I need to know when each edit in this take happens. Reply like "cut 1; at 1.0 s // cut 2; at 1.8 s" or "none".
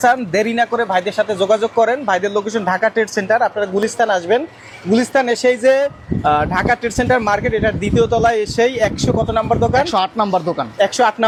none